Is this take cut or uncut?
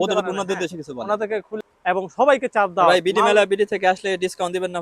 cut